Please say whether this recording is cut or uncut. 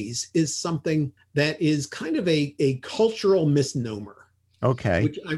uncut